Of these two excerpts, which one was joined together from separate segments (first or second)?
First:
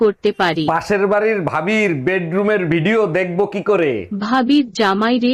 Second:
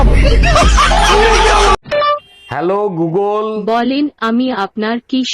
second